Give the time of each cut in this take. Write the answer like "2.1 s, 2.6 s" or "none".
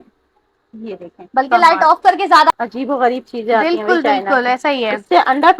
2.5 s